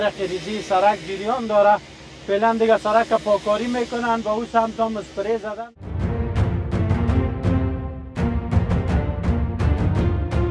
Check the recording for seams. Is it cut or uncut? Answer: cut